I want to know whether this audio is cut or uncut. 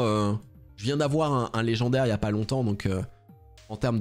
uncut